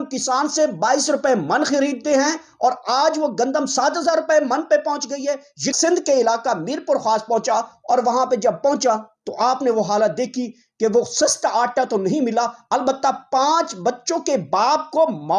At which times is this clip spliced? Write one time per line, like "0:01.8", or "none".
0:05.7